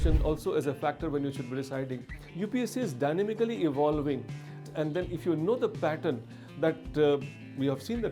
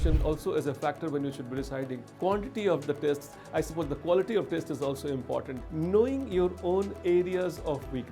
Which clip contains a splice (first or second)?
second